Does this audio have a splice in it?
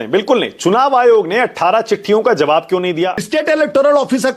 yes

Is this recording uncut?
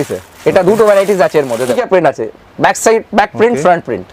no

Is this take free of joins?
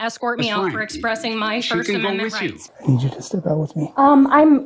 no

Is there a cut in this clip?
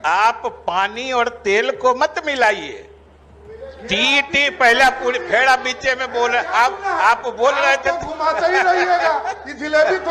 no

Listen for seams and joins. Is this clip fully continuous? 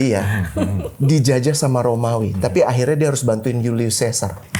yes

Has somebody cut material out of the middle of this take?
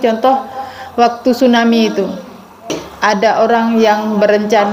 yes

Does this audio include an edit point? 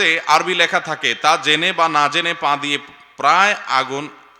no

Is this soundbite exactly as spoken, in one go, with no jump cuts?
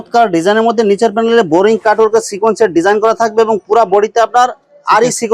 yes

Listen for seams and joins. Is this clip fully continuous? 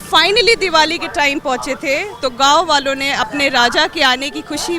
yes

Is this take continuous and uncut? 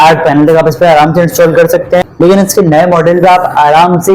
no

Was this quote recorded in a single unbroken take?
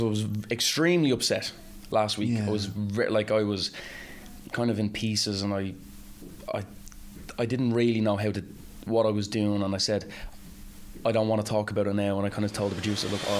yes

